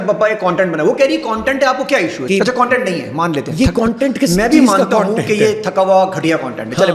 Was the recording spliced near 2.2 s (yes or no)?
yes